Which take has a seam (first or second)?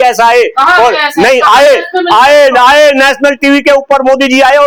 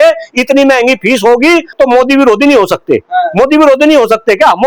second